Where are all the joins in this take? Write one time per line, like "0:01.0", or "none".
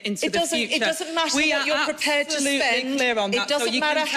none